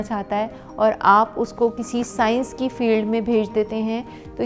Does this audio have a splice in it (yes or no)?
no